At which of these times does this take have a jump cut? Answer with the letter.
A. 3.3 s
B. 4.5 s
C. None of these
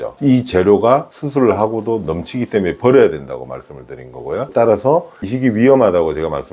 B